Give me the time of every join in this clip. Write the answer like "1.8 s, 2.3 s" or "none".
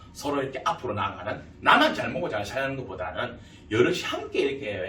1.5 s